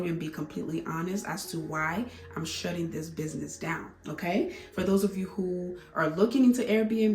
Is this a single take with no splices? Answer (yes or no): yes